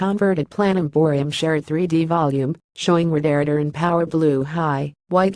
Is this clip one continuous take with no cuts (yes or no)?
no